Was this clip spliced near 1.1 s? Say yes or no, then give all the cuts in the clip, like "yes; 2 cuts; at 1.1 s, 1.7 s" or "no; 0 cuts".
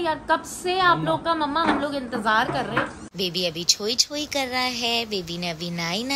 no; 1 cut; at 3.0 s